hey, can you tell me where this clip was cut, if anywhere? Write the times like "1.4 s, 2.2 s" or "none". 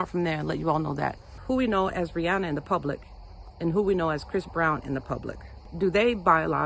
1.3 s, 5.7 s

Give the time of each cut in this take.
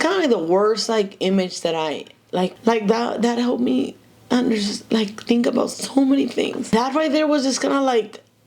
2.6 s, 6.7 s

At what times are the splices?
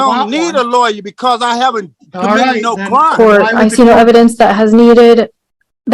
3.1 s

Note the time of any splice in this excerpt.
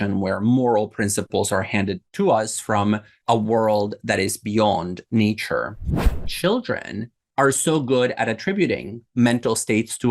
2.0 s, 3.2 s, 6.2 s

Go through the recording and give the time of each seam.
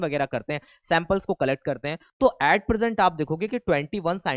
2.0 s

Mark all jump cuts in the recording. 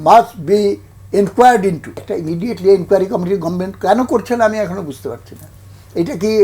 2.1 s

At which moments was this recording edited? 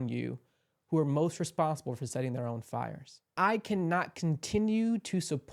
3.3 s

